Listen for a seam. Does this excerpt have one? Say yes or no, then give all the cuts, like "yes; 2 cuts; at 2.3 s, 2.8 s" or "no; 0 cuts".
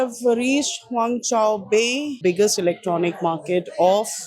no; 0 cuts